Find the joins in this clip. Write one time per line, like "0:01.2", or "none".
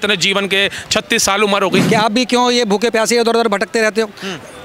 0:01.8